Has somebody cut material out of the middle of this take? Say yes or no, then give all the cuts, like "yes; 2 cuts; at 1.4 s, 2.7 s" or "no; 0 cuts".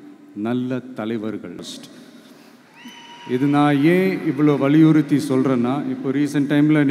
yes; 1 cut; at 1.6 s